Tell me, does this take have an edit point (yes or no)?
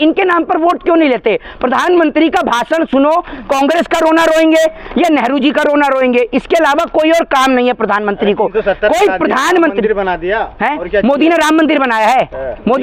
no